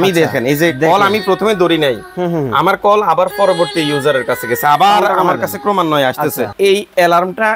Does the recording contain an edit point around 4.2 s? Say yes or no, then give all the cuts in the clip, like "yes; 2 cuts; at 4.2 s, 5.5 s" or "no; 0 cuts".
no; 1 cut; at 6.5 s